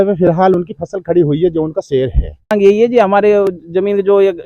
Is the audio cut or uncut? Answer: cut